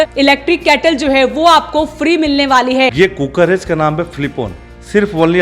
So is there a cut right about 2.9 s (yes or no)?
yes